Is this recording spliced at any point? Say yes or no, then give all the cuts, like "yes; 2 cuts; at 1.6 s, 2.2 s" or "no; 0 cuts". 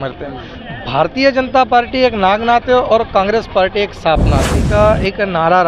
yes; 1 cut; at 4.6 s